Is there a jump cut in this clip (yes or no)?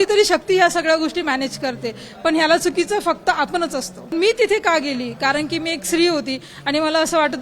yes